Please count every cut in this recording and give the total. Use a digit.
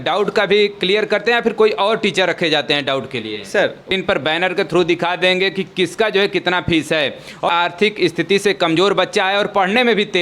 2